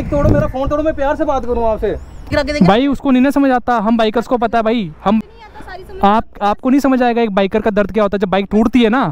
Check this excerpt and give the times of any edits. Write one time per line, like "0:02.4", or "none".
0:02.3
0:05.2